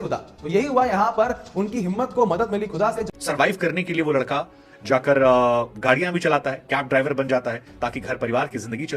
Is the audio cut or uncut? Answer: cut